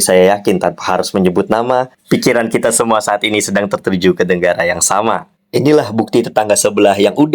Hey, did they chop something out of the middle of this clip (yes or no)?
no